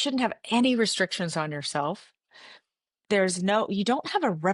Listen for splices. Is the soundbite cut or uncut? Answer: uncut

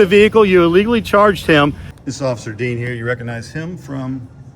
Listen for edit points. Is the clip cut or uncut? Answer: cut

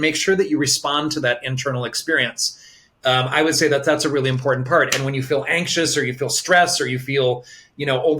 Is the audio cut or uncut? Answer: uncut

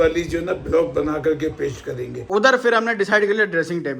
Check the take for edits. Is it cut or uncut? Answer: cut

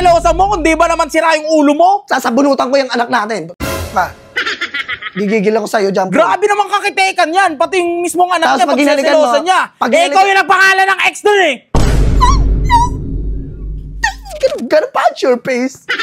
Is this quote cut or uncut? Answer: uncut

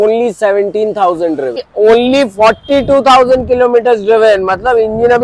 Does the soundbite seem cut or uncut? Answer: cut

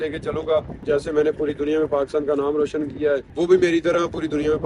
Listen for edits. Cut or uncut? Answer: cut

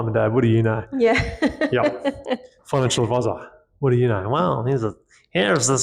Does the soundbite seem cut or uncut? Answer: uncut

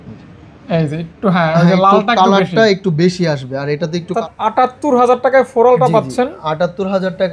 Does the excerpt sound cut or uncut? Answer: cut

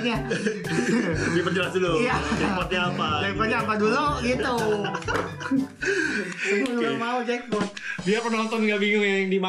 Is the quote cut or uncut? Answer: uncut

